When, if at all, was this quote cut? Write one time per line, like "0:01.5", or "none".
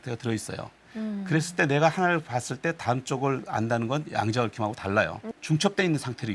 none